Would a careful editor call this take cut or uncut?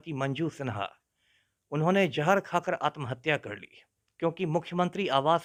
uncut